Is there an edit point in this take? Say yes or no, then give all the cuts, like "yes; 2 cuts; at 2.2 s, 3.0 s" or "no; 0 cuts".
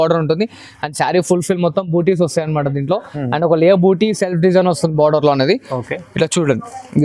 no; 0 cuts